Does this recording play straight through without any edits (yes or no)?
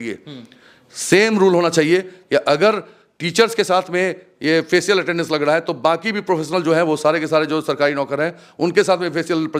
yes